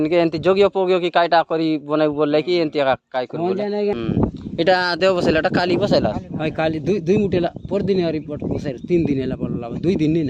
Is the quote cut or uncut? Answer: cut